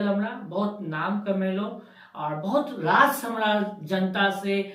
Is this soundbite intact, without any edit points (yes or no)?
yes